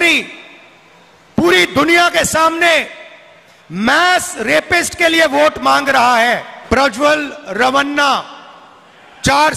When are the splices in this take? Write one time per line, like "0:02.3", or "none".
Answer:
0:06.5